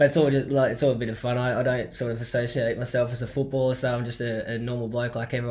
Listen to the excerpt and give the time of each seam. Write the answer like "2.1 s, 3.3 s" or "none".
none